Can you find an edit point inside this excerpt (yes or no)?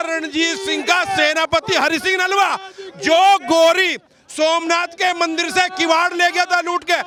no